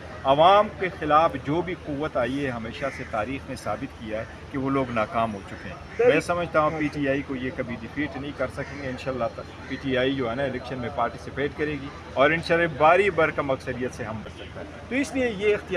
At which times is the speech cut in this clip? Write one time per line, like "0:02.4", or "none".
0:14.2